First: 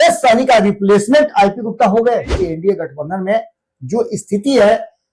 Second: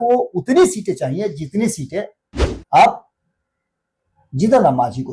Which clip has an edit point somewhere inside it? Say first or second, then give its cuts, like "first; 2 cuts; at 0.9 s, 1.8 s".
first; 1 cut; at 2.4 s